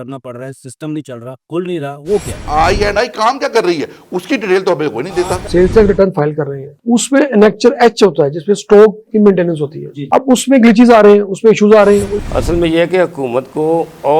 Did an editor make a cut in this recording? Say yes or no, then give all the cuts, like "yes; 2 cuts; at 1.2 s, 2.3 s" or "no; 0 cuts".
yes; 3 cuts; at 2.4 s, 5.5 s, 12.2 s